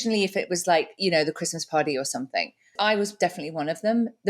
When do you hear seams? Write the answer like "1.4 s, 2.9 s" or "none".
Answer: 2.7 s